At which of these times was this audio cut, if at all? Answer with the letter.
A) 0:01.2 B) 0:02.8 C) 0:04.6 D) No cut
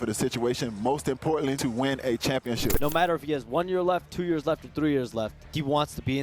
B